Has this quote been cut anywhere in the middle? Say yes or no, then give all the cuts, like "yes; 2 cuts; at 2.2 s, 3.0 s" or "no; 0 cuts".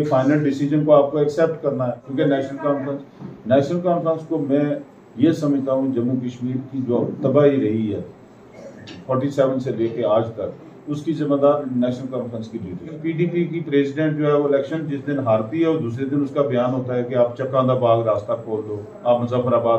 yes; 2 cuts; at 2.0 s, 13.0 s